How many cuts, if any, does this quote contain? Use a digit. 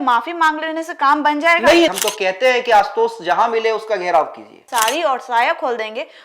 2